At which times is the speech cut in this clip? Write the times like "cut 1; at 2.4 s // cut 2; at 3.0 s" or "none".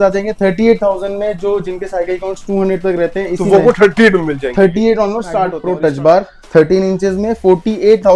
cut 1; at 5.6 s